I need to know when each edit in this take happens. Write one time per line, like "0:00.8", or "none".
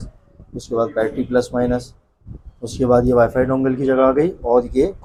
none